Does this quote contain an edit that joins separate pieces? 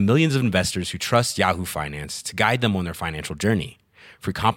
no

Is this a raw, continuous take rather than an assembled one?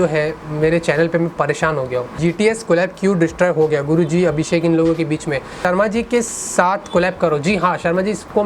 no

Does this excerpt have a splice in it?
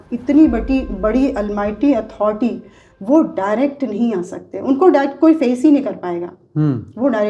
no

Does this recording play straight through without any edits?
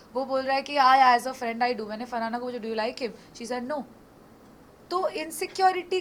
yes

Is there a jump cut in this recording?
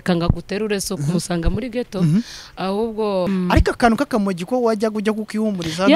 yes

